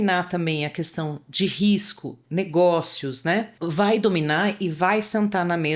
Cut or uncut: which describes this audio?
cut